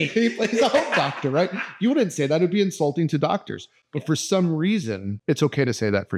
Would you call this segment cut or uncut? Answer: uncut